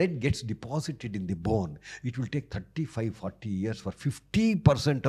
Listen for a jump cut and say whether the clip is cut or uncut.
uncut